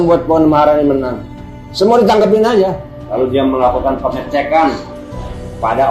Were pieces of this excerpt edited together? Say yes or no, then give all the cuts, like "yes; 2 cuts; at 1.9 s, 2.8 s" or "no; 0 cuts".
yes; 1 cut; at 2.9 s